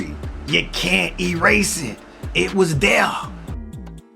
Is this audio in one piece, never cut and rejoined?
no; 1 cut; at 3.2 s

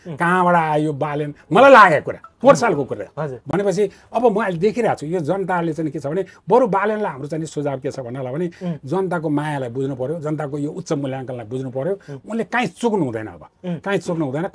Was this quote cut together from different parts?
no; 0 cuts

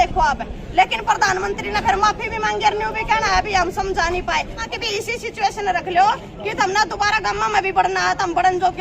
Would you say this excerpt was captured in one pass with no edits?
no; 1 cut; at 4.7 s

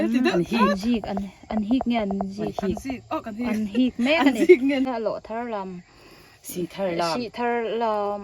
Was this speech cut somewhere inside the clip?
yes; 1 cut; at 4.9 s

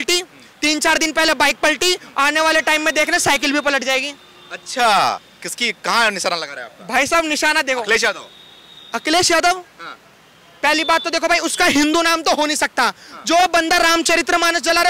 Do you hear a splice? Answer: no; 0 cuts

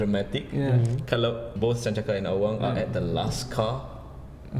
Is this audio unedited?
no; 1 cut; at 1.5 s

